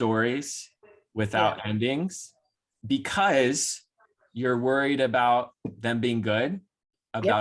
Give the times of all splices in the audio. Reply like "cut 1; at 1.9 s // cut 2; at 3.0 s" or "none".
none